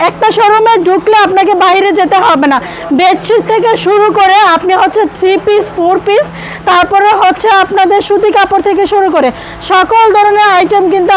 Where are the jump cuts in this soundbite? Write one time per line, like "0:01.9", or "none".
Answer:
none